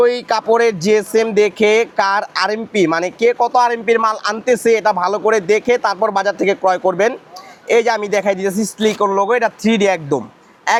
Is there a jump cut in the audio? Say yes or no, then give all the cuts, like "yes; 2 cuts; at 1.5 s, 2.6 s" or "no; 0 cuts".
no; 0 cuts